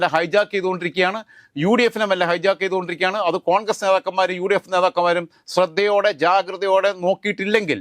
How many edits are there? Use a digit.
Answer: 0